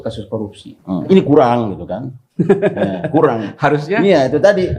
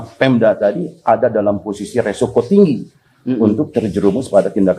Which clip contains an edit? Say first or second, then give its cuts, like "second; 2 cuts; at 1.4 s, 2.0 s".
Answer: first; 1 cut; at 1.1 s